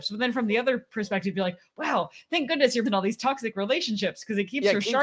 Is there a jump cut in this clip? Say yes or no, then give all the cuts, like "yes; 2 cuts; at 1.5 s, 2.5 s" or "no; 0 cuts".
yes; 1 cut; at 2.8 s